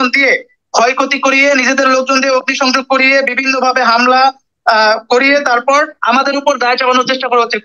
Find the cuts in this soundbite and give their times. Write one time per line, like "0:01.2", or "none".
none